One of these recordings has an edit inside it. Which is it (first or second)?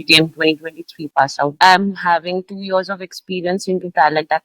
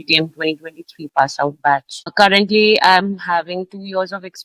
first